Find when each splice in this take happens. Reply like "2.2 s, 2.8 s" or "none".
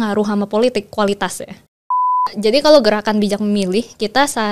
2.2 s

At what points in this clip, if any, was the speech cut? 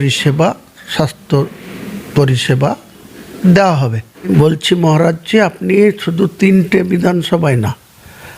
4.3 s

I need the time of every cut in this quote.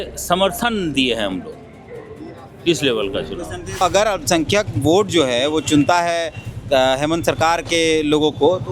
3.8 s

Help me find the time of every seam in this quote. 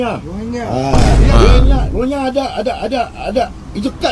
none

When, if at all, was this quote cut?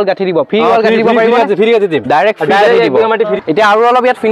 3.3 s

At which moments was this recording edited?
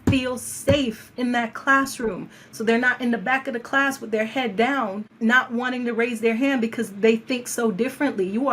5.0 s

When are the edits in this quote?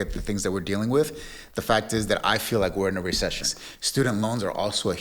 3.5 s

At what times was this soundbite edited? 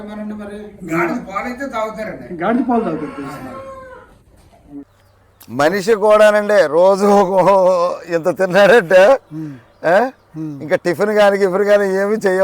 4.9 s

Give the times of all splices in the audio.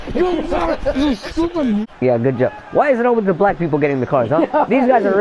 1.8 s

